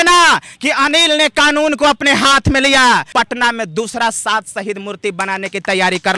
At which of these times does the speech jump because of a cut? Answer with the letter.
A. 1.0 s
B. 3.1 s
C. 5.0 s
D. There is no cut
B